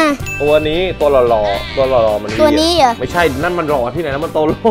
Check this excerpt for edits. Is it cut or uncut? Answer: uncut